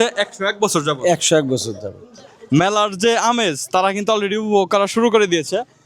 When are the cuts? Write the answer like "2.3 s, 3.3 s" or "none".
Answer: 2.3 s